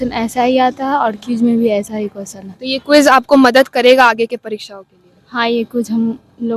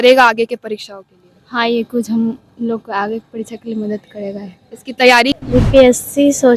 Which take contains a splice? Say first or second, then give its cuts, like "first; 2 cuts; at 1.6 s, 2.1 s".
second; 1 cut; at 5.3 s